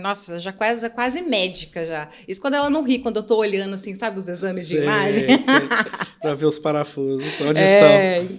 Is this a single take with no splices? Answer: yes; 0 cuts

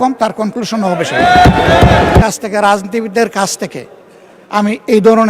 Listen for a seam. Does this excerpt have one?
yes; 1 cut; at 2.2 s

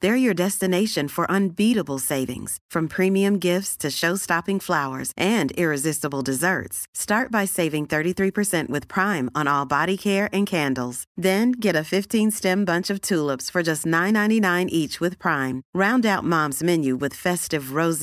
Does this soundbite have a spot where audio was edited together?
no; 0 cuts

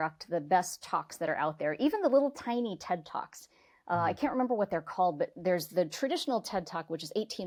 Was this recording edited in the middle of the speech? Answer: no; 0 cuts

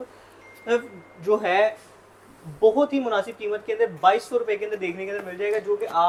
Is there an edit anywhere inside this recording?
no; 0 cuts

